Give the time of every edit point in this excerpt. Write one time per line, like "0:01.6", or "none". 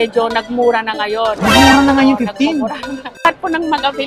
0:03.1